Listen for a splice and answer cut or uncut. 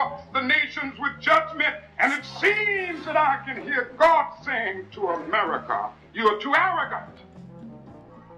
uncut